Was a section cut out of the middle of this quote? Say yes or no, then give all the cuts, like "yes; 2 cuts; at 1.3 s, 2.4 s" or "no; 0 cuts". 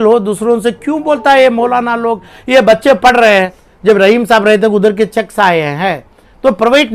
yes; 1 cut; at 3.6 s